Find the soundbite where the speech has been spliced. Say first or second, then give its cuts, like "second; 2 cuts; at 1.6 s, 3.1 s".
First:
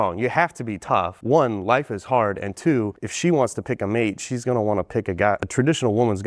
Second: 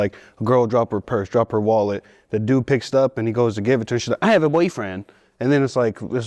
first; 3 cuts; at 1.1 s, 3.0 s, 5.4 s